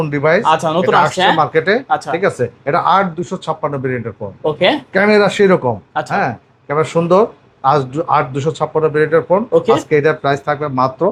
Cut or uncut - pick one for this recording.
uncut